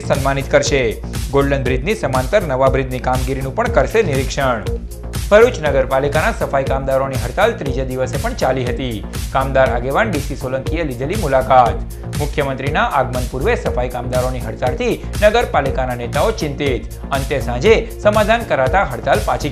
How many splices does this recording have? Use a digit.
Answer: 0